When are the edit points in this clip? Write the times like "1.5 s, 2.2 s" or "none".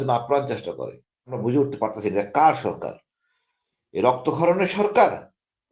1.4 s